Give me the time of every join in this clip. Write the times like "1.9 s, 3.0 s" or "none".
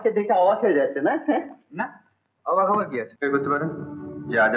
3.1 s